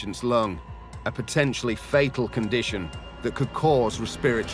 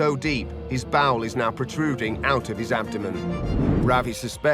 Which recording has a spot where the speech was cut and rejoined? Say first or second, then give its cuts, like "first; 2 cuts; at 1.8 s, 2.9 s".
second; 1 cut; at 3.5 s